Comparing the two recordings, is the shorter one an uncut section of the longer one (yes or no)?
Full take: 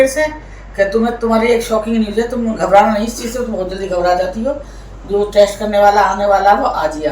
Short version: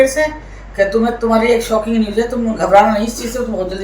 yes